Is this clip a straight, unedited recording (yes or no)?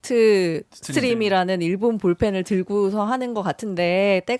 yes